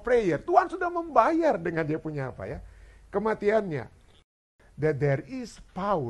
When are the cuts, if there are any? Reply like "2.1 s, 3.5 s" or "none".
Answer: 4.2 s